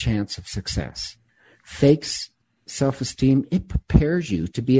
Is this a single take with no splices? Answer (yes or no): yes